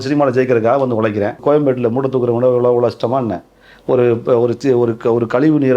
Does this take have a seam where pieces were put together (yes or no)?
yes